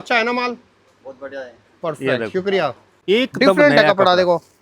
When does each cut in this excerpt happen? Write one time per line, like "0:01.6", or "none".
0:02.9